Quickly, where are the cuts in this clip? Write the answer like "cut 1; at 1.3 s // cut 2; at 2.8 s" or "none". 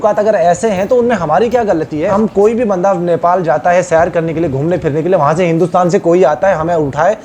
cut 1; at 2.1 s